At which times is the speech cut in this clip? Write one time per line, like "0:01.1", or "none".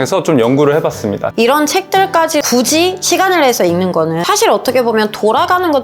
0:01.3
0:02.5
0:04.2